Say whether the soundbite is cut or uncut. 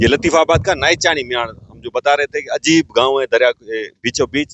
uncut